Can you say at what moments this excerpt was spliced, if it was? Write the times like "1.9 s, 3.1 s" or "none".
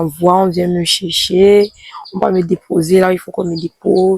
none